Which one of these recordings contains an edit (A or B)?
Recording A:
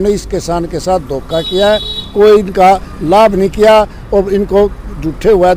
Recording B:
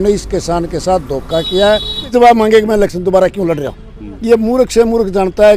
B